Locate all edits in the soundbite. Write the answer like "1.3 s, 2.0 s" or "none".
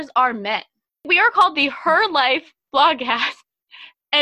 1.0 s